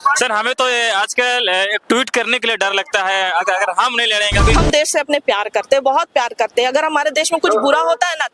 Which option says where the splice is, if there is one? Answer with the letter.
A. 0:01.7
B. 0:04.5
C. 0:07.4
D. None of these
B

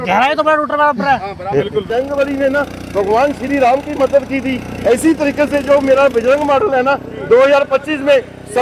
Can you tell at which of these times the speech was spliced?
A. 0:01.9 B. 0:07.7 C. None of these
A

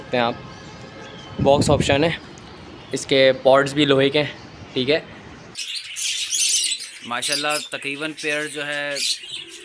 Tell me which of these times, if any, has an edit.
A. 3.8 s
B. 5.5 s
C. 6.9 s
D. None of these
B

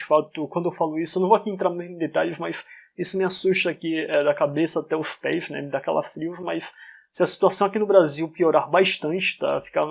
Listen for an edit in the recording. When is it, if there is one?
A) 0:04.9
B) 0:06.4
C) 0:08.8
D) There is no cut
D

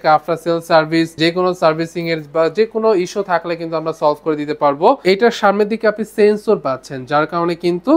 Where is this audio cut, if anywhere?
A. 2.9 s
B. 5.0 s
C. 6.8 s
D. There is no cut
B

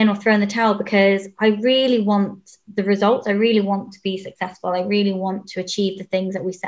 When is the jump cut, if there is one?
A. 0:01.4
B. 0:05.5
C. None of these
C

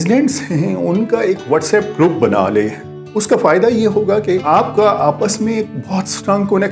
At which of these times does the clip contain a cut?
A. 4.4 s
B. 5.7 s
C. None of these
A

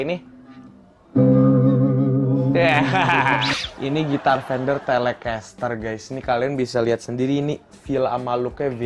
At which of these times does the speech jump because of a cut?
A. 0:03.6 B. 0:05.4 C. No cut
A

